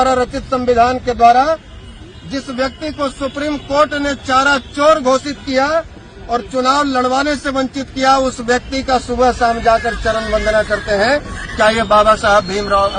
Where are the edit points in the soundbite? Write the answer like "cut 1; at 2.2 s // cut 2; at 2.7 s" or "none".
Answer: none

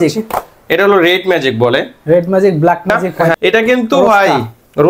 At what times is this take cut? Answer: cut 1; at 3.4 s

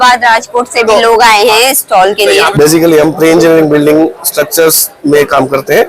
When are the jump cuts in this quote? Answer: cut 1; at 2.5 s

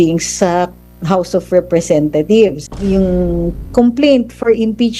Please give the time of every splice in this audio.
cut 1; at 2.7 s

